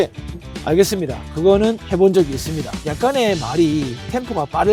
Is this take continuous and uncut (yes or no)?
yes